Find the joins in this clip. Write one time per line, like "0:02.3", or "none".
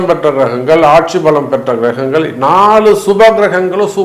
none